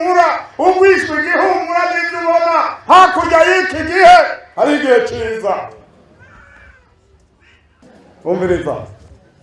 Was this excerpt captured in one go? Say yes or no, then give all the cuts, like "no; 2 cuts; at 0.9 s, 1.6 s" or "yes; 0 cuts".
no; 1 cut; at 7.8 s